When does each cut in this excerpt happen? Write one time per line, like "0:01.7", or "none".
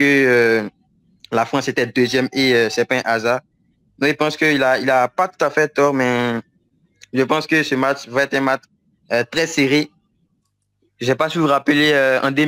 none